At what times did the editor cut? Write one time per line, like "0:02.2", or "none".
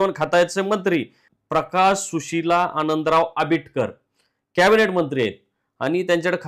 0:01.2